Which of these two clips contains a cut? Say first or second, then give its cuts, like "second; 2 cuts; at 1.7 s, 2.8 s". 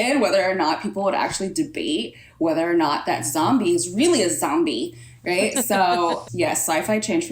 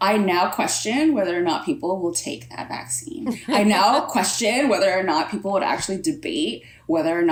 first; 1 cut; at 6.2 s